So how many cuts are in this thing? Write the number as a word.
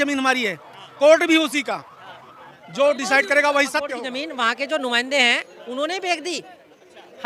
one